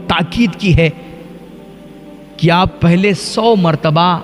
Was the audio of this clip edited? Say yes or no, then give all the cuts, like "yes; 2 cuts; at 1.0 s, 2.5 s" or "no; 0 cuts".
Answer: no; 0 cuts